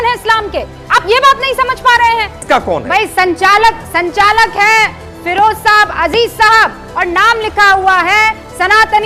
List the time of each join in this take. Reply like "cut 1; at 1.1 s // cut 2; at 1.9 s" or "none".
cut 1; at 2.4 s